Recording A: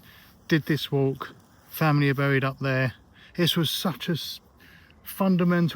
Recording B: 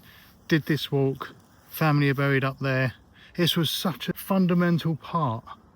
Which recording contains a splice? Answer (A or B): B